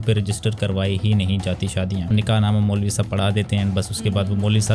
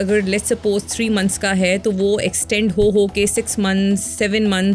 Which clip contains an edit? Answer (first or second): first